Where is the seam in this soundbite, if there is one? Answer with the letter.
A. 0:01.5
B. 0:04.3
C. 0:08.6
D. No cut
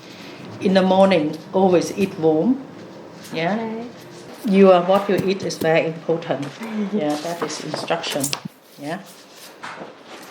B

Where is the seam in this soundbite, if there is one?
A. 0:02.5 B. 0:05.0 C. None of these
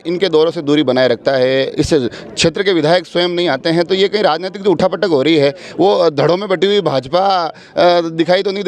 C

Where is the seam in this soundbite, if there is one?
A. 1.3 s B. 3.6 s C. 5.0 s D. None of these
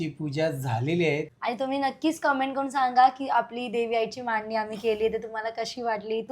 A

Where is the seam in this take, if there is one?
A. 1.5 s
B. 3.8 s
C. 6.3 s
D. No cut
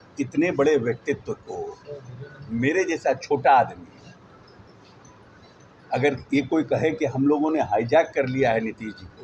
D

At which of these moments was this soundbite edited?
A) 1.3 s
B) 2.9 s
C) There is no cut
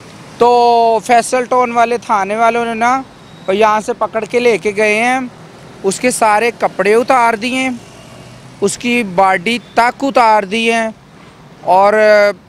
C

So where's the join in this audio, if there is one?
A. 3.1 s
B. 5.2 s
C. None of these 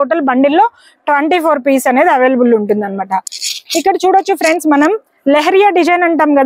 C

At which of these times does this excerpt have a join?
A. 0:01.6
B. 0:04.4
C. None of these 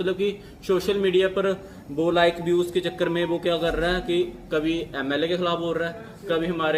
C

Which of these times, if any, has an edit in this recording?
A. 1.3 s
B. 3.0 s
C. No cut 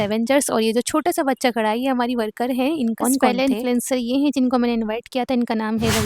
B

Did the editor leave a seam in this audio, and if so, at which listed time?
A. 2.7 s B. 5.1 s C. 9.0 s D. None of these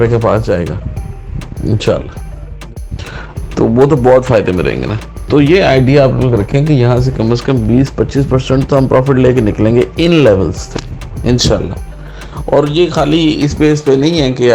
A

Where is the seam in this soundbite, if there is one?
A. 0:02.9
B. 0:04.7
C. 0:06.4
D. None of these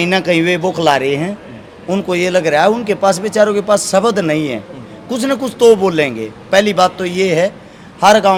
D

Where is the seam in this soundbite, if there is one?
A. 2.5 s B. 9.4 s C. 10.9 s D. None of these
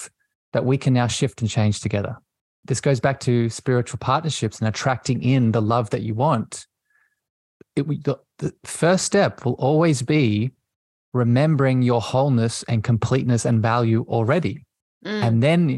A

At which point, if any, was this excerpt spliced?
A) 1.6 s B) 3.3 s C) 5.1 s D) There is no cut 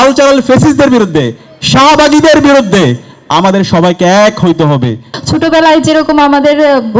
C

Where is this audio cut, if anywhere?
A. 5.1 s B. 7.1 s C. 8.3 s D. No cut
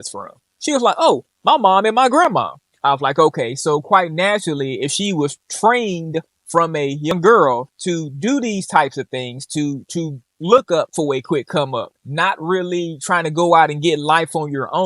B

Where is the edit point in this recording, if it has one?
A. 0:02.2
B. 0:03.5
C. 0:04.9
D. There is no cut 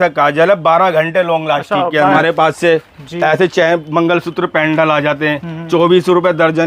A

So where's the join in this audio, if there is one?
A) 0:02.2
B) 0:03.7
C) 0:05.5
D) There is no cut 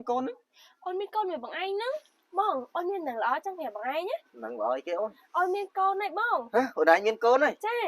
A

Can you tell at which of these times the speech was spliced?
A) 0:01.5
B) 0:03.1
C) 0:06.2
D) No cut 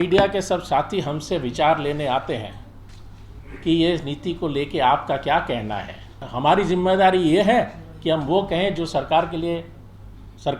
C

